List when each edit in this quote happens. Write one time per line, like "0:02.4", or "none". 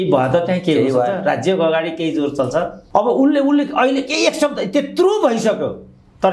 0:02.8